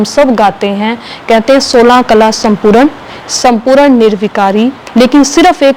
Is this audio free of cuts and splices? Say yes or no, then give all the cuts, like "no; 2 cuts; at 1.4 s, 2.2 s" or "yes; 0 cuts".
no; 1 cut; at 4.8 s